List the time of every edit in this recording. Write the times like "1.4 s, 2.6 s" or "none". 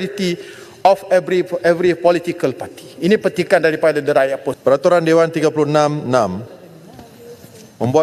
4.5 s